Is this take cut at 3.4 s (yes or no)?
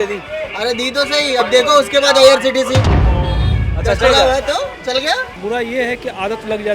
no